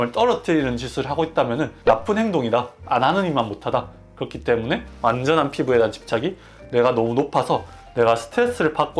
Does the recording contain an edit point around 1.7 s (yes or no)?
yes